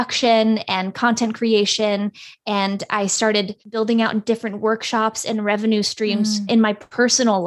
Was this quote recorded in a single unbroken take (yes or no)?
no